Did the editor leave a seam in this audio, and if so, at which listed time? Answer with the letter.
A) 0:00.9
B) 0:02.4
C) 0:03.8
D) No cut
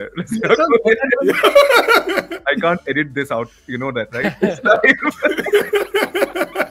B